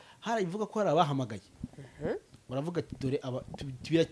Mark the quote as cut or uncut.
uncut